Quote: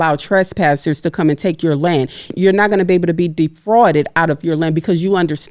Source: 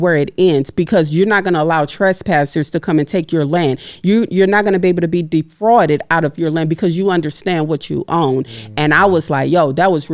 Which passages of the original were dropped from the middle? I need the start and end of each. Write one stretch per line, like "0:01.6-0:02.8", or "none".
0:04.0-0:04.3